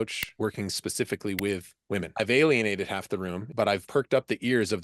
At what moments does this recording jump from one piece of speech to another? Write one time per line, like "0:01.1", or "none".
0:02.1
0:03.7